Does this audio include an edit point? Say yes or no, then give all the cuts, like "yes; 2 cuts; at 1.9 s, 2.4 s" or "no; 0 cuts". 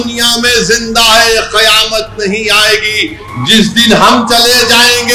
no; 0 cuts